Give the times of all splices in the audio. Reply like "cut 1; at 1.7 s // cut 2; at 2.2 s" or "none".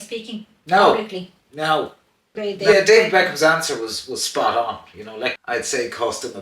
cut 1; at 2.4 s // cut 2; at 5.4 s